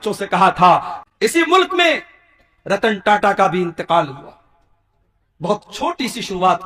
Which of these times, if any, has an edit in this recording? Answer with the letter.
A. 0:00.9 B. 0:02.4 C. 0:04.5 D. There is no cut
A